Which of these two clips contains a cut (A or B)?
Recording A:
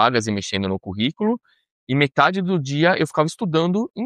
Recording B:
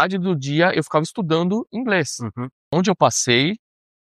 B